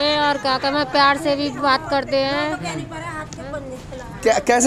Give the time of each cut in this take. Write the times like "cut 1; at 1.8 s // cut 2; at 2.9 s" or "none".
none